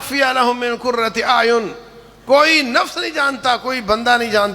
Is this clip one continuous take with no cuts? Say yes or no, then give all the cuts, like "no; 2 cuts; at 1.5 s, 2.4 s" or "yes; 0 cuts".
yes; 0 cuts